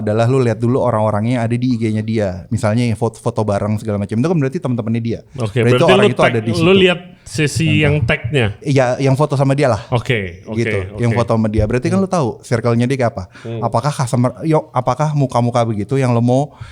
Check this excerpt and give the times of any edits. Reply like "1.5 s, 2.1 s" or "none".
none